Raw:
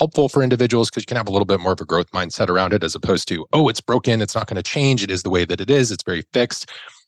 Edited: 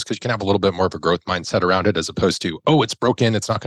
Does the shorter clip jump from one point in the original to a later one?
no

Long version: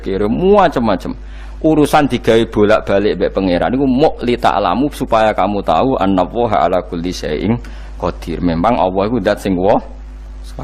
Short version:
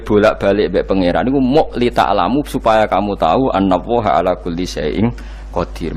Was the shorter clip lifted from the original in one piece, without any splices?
yes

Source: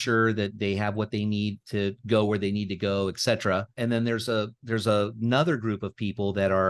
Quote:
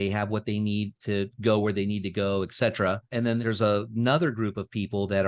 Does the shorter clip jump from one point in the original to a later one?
yes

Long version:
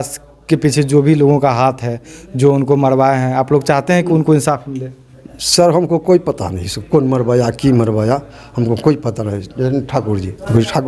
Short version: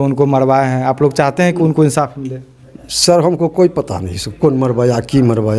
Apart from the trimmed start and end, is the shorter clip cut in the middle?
no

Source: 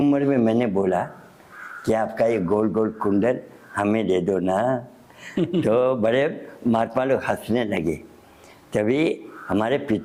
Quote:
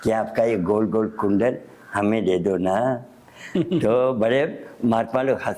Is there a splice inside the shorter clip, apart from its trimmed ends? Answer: no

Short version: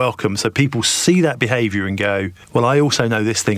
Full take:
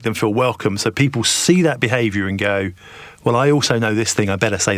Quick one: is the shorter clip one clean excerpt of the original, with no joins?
no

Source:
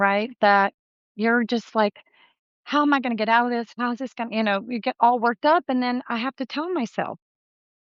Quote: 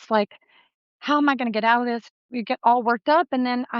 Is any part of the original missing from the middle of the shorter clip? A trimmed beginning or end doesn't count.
yes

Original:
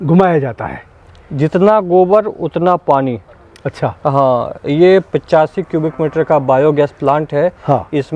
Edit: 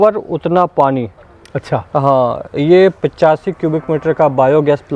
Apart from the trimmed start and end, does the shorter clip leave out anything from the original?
no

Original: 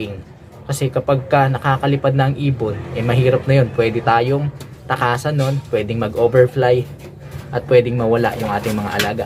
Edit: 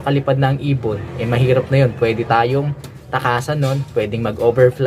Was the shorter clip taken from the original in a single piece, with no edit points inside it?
yes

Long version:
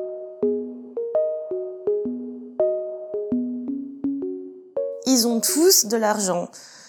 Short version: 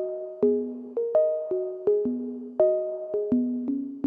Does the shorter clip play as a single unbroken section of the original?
yes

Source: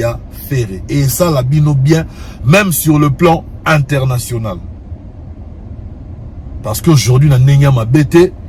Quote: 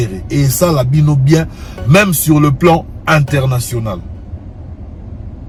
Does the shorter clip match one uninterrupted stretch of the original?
yes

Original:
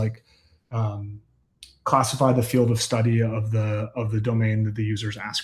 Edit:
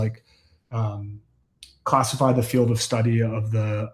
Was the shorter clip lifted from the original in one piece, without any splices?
yes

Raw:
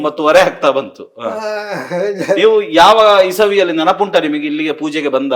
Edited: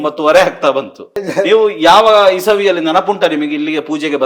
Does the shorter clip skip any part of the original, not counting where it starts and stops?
yes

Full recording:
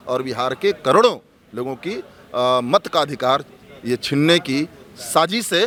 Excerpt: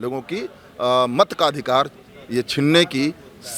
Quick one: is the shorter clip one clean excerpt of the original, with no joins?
yes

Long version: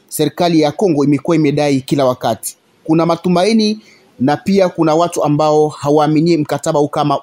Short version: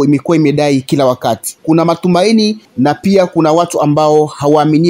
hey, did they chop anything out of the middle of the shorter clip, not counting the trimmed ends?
yes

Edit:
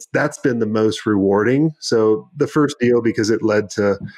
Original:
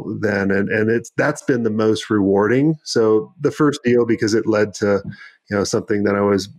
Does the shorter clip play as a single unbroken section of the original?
yes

